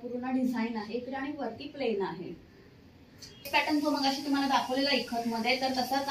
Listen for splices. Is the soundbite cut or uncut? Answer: uncut